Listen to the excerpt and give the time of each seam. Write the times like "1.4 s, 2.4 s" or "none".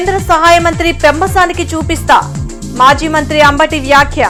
none